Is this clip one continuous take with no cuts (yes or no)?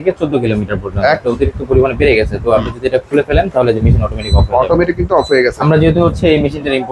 no